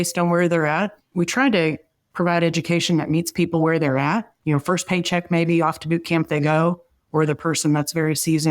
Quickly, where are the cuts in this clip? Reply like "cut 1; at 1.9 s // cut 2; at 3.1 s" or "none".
cut 1; at 1.0 s // cut 2; at 4.3 s